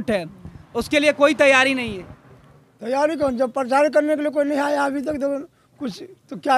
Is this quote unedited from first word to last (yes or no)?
yes